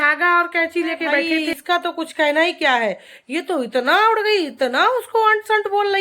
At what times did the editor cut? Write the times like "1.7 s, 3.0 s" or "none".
1.3 s